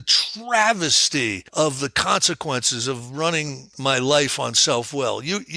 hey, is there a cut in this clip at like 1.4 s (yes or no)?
yes